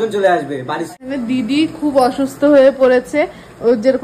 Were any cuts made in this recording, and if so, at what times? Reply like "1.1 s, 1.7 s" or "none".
1.0 s